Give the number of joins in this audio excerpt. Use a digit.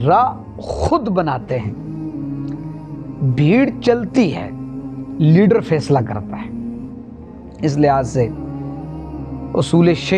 2